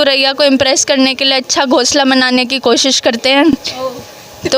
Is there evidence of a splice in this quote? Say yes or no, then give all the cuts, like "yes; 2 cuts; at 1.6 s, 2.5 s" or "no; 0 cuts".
no; 0 cuts